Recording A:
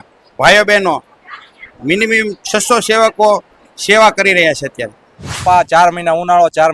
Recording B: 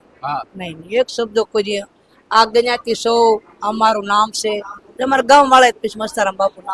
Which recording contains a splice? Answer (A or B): A